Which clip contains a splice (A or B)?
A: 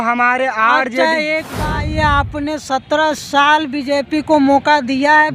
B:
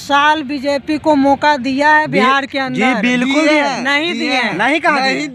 A